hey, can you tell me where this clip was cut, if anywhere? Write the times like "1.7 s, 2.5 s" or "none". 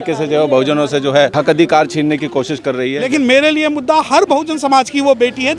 1.3 s, 3.0 s